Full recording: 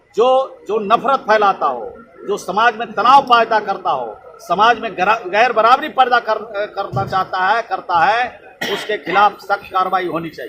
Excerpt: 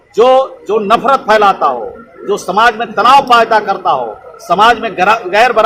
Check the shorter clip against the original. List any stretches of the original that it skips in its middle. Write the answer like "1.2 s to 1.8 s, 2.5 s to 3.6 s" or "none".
none